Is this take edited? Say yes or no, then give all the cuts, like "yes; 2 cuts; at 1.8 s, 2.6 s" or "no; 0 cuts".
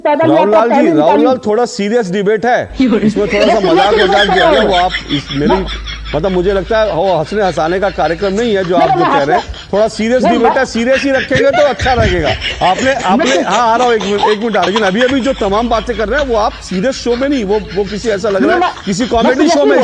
no; 0 cuts